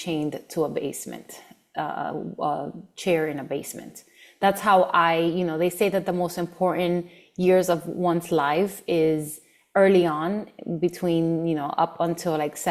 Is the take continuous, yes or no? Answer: yes